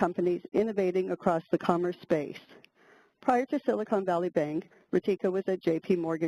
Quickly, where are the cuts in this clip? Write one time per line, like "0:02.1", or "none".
0:04.2